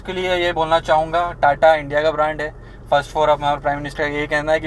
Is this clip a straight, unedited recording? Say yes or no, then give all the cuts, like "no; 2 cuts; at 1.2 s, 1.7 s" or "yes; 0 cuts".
yes; 0 cuts